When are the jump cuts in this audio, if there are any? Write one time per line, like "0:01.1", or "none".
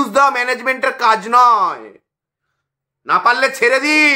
none